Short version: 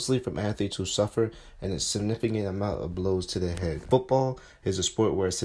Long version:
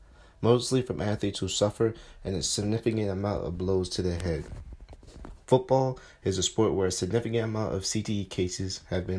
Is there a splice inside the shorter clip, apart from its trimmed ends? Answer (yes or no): yes